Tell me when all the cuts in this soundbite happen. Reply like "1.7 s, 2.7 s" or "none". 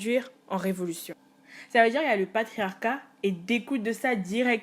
1.1 s